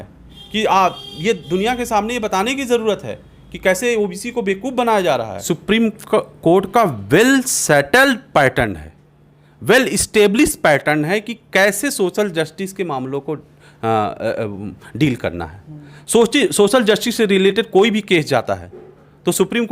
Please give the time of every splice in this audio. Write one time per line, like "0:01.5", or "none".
0:05.4